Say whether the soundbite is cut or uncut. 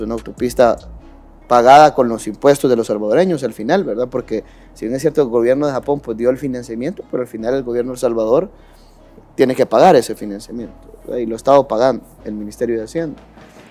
uncut